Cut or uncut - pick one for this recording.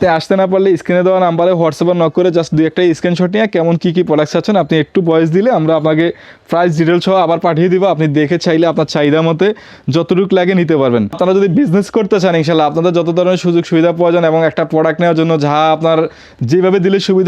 cut